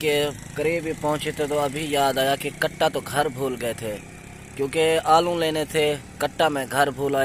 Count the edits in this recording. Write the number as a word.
zero